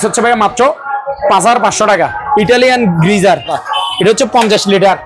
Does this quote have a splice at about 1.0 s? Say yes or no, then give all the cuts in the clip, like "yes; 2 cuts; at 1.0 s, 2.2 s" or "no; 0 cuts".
no; 2 cuts; at 2.2 s, 3.6 s